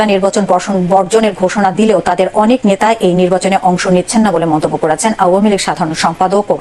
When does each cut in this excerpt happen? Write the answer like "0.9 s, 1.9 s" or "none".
none